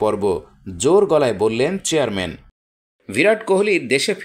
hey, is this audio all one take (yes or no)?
no